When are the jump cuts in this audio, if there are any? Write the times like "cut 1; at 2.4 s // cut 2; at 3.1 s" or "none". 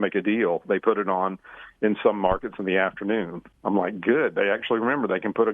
cut 1; at 3.4 s